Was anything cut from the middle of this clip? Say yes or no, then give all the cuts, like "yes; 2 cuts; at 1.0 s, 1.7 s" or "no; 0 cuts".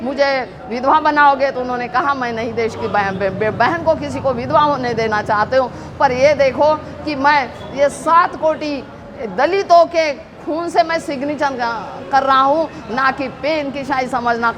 no; 0 cuts